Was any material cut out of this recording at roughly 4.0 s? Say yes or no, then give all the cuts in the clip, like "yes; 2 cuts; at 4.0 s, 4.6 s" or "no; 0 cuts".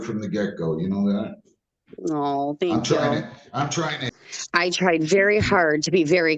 yes; 1 cut; at 4.0 s